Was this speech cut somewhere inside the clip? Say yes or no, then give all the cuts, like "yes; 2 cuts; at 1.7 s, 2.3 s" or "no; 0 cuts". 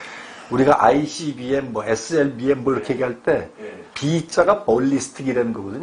no; 0 cuts